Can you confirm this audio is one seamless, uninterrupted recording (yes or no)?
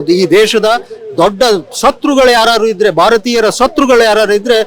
yes